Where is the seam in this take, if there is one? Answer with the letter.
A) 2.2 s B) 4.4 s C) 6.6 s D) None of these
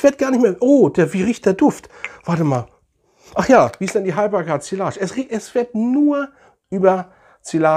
D